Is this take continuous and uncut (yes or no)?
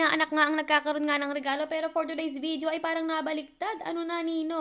yes